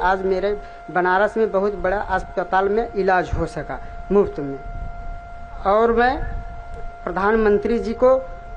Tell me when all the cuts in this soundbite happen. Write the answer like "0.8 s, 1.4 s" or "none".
none